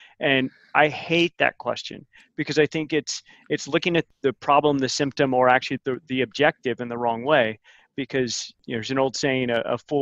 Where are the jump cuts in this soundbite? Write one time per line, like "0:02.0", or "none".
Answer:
0:04.1
0:05.7